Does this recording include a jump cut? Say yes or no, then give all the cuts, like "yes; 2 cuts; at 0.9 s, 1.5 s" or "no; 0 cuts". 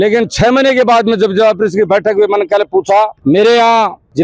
no; 0 cuts